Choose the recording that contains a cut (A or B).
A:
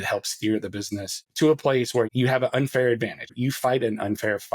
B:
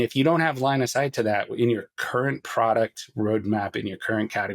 A